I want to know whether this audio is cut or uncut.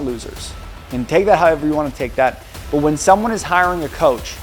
uncut